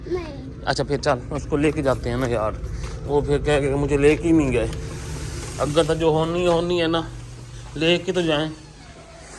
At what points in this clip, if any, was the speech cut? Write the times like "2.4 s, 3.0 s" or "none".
none